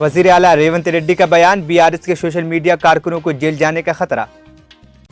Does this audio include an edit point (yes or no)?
no